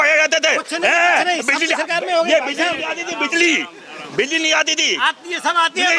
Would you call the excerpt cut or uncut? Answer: uncut